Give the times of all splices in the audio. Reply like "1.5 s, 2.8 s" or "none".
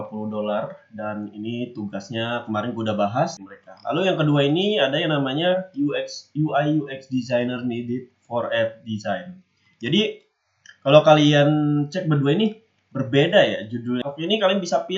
3.4 s, 14.0 s